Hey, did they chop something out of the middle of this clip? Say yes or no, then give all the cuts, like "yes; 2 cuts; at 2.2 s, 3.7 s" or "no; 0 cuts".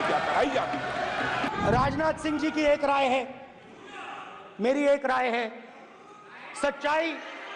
yes; 1 cut; at 1.5 s